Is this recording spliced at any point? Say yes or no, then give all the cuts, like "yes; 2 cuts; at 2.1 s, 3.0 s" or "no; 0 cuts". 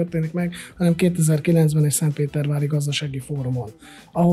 no; 0 cuts